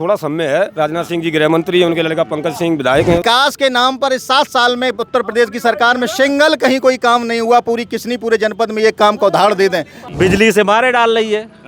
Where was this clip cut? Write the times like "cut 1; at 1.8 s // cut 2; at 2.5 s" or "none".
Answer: cut 1; at 3.2 s // cut 2; at 10.0 s